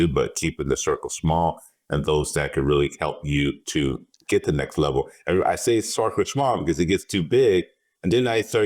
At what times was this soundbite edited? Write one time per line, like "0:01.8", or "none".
none